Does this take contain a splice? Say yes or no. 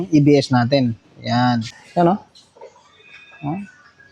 yes